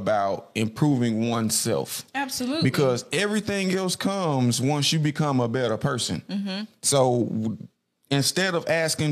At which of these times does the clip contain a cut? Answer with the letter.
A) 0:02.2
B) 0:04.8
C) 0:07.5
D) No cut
D